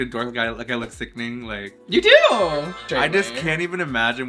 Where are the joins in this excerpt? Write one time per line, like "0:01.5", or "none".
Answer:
0:01.7
0:02.9